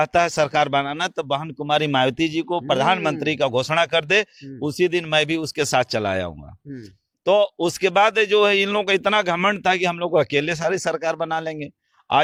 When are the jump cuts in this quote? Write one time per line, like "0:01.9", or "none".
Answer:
none